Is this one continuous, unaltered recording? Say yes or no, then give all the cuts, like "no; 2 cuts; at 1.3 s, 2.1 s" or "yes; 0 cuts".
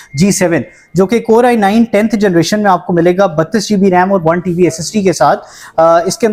yes; 0 cuts